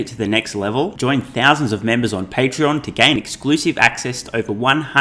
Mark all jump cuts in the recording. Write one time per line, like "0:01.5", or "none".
none